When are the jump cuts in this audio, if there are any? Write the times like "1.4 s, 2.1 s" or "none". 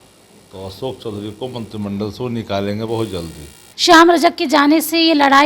3.7 s